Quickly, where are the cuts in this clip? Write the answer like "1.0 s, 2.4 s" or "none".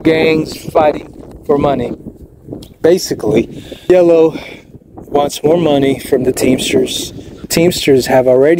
3.9 s, 7.4 s